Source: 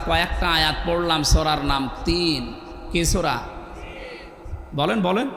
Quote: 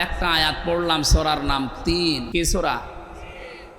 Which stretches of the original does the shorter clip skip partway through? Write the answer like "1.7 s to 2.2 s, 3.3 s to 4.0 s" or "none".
2.5 s to 2.9 s